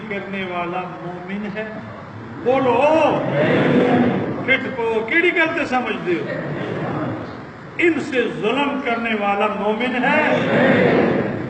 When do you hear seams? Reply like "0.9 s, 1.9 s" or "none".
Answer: none

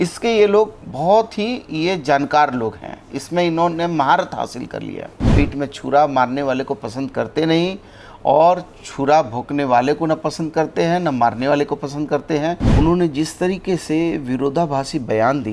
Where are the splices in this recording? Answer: 5.3 s, 12.6 s

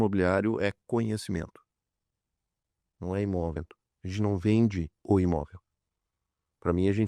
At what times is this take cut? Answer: 3.6 s

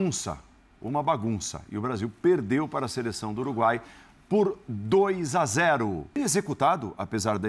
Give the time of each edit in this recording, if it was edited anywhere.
6.2 s

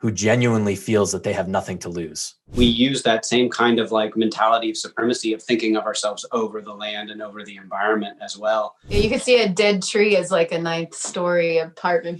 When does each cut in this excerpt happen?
2.5 s, 8.9 s

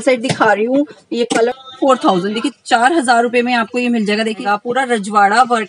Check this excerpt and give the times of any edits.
1.5 s, 4.4 s

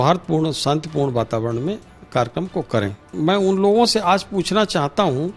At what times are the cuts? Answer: 3.1 s

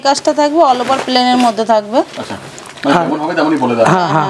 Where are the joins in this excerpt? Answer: none

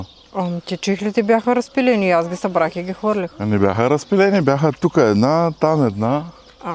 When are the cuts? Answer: none

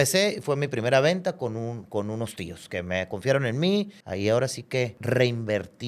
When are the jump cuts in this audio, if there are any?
4.0 s, 5.0 s

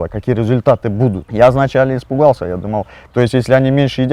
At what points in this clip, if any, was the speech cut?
1.2 s

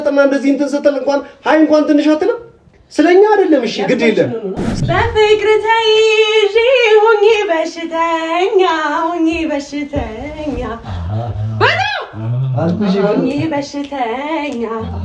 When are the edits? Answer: 4.7 s

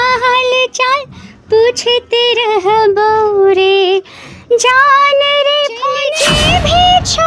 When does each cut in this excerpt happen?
6.1 s

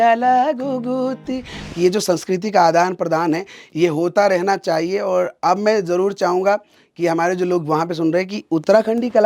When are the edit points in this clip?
1.6 s

